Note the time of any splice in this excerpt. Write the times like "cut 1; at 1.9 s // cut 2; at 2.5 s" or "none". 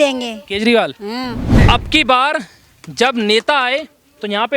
cut 1; at 1.6 s